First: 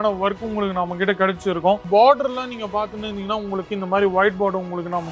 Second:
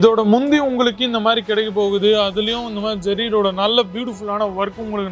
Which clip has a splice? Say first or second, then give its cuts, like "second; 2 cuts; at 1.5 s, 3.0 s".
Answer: first; 1 cut; at 1.8 s